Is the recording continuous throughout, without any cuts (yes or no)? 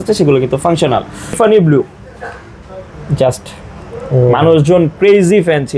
no